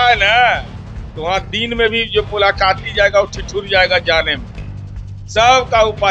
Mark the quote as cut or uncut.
uncut